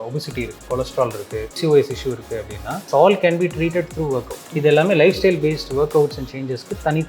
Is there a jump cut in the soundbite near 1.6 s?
yes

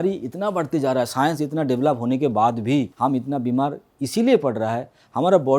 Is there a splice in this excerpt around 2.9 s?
yes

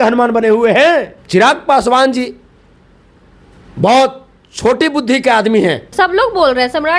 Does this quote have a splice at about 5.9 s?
yes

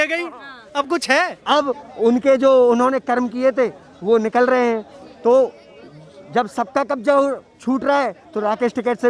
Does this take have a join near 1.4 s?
yes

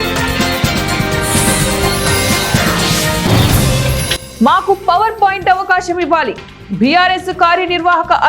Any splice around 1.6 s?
no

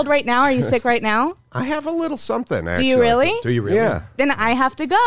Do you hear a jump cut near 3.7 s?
no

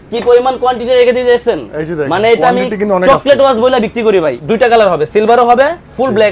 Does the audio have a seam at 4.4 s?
yes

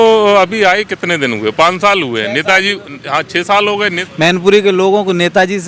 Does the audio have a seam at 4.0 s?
yes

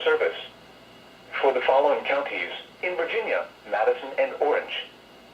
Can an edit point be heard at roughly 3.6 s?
yes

